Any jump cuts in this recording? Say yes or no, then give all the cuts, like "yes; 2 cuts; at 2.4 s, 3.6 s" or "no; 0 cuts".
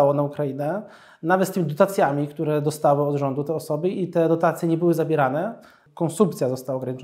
yes; 1 cut; at 5.8 s